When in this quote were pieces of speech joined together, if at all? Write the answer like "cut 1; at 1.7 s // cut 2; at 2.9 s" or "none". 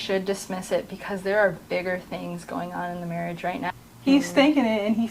cut 1; at 3.7 s